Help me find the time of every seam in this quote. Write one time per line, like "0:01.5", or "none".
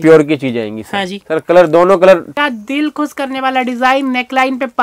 0:02.3